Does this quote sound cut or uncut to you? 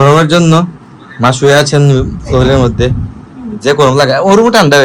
uncut